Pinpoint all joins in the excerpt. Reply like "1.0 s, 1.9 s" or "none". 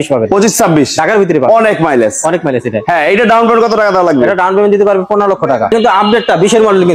5.7 s